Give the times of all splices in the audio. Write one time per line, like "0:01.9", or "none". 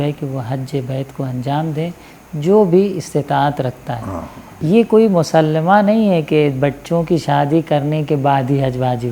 0:04.6